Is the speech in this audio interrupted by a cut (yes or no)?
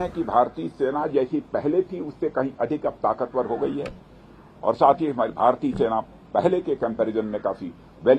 no